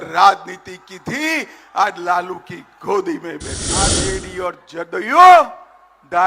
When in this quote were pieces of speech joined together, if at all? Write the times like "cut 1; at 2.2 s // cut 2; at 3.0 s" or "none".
cut 1; at 4.0 s